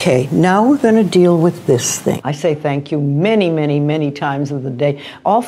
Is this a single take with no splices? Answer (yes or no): no